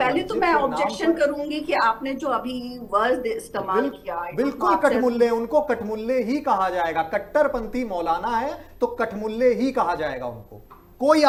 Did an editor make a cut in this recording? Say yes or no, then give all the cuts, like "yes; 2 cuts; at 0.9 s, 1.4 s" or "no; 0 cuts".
no; 0 cuts